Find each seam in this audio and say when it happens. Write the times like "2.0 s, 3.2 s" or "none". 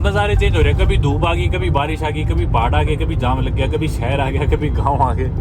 none